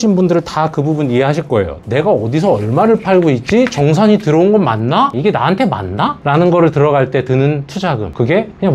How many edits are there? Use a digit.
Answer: 2